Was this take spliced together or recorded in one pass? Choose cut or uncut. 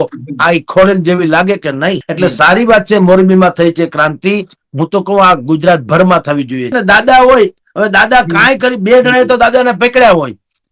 cut